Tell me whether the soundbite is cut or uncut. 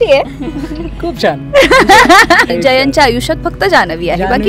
cut